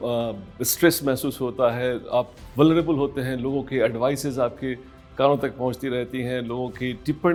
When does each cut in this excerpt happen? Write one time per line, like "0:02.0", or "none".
none

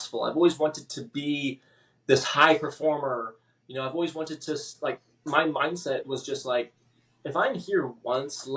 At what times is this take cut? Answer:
none

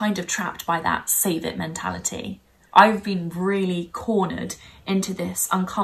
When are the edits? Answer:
none

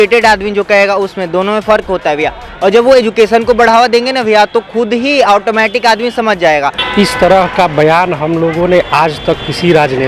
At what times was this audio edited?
0:06.7

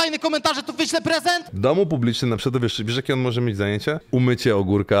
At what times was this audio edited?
0:01.5
0:04.0

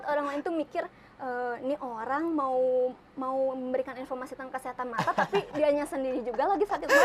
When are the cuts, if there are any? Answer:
none

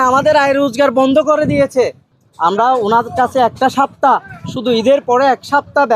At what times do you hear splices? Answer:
0:02.0

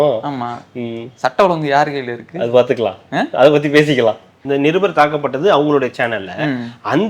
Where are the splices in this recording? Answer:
0:04.3

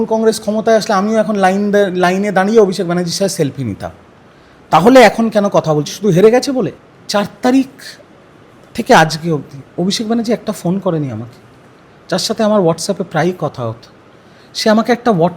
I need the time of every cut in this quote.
0:06.8

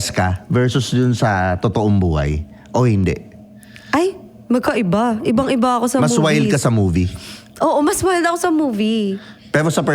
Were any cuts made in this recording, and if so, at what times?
none

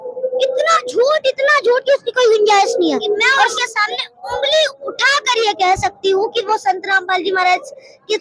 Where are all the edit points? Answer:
0:03.5

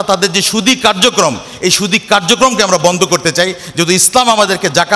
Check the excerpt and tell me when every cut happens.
none

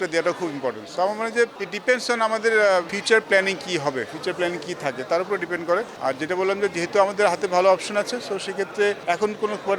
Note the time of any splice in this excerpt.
none

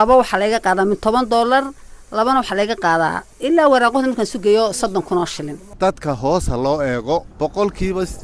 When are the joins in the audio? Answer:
0:05.7

